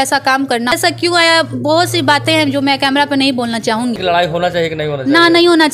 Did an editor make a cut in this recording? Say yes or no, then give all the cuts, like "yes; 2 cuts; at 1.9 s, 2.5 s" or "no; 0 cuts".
yes; 2 cuts; at 0.7 s, 4.0 s